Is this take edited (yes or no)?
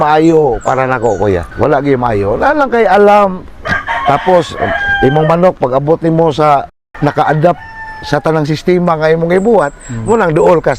yes